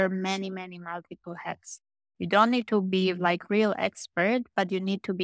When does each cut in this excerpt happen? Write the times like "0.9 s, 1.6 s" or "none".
none